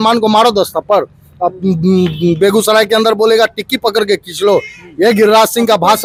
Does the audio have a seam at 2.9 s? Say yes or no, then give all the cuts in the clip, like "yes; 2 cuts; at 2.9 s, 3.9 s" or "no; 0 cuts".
no; 0 cuts